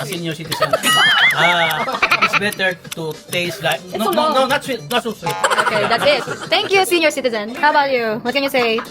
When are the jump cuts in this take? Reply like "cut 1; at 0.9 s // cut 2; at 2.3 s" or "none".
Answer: none